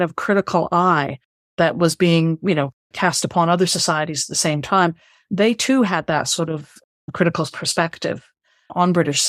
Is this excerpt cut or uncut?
uncut